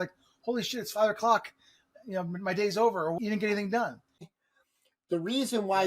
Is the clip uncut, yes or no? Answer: no